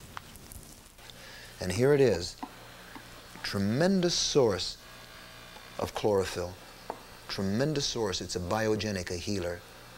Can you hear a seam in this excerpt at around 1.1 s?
yes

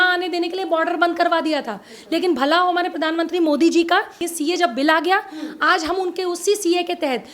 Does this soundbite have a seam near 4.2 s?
yes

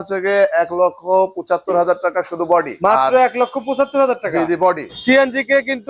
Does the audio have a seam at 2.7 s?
yes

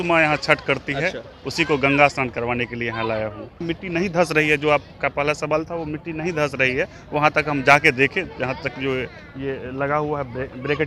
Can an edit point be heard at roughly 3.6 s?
yes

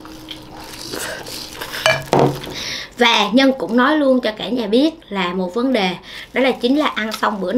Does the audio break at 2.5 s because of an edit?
yes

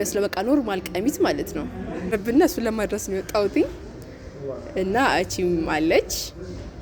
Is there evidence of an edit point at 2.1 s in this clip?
yes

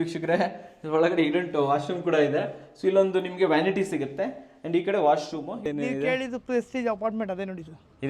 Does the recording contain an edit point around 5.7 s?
yes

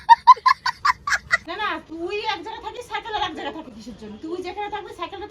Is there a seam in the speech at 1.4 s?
yes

